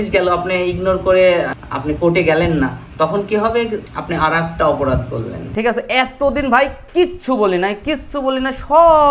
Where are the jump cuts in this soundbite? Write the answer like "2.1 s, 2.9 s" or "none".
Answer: 5.4 s